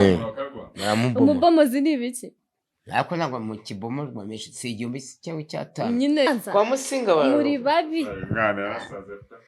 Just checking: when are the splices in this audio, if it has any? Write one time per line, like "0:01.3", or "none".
0:06.3